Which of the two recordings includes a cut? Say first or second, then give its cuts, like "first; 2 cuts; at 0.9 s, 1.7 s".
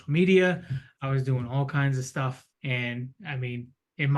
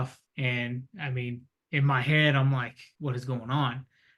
second; 1 cut; at 2.8 s